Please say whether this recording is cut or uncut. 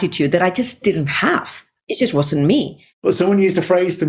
cut